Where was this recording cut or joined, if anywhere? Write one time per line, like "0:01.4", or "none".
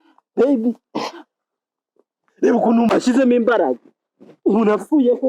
0:02.9